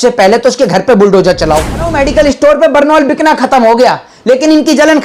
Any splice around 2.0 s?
yes; 1 cut; at 2.0 s

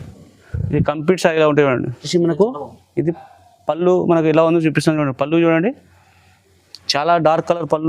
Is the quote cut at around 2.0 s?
yes; 1 cut; at 2.0 s

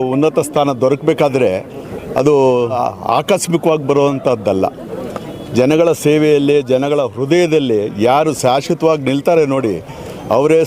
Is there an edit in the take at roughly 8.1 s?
no; 1 cut; at 2.8 s

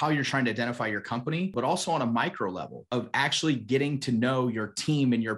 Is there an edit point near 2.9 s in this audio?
yes; 2 cuts; at 1.5 s, 2.9 s

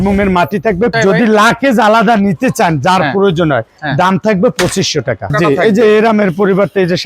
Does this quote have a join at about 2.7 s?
no; 2 cuts; at 0.9 s, 5.3 s

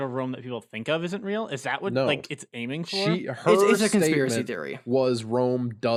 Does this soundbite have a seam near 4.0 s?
no; 0 cuts

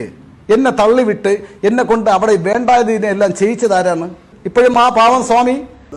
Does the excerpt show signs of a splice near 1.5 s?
no; 1 cut; at 4.3 s

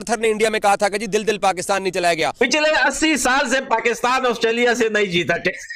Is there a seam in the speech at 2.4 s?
yes; 1 cut; at 2.4 s

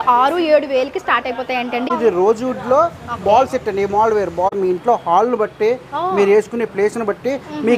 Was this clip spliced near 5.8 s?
no; 2 cuts; at 1.9 s, 4.5 s

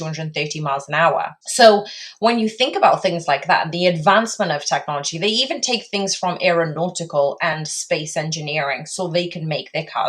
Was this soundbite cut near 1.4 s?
yes; 1 cut; at 1.4 s

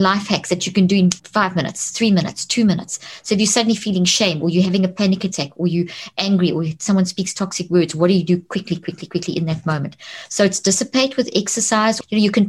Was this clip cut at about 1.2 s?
yes; 1 cut; at 1.2 s

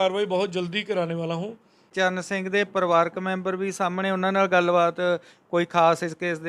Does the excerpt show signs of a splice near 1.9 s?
yes; 1 cut; at 1.9 s

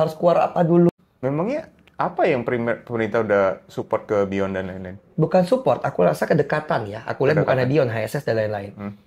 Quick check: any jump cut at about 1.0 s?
yes; 1 cut; at 1.0 s

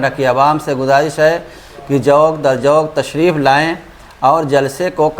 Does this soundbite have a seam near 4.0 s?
no; 0 cuts

